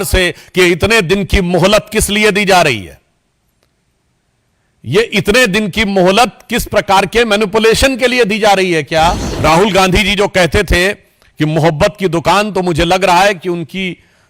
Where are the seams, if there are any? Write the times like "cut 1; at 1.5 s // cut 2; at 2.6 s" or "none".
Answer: cut 1; at 9.3 s